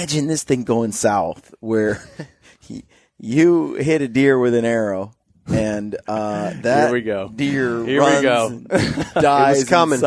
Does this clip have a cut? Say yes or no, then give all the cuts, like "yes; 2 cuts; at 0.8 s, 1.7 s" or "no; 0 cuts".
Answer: no; 0 cuts